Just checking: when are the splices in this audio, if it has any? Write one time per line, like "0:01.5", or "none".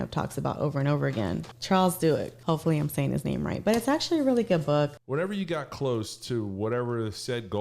0:01.5
0:02.3
0:05.0